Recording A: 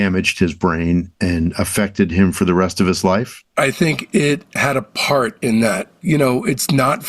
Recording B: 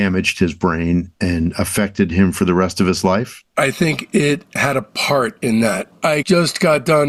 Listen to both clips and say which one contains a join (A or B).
A